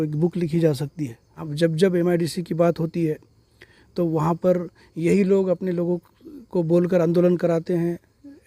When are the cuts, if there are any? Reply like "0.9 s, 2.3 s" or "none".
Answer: 1.5 s